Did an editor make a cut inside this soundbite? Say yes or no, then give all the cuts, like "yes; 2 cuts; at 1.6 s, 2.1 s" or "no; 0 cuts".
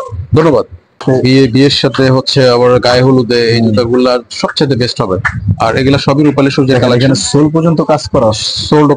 yes; 1 cut; at 1.0 s